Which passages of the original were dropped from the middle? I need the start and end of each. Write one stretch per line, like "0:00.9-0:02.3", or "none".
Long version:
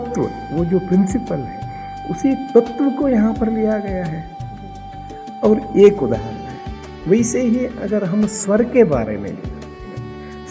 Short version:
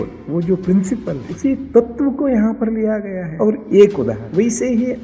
0:01.5-0:02.0
0:04.0-0:05.2
0:06.3-0:07.0